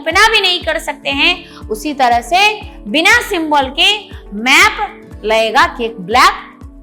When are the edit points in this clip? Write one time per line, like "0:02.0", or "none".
none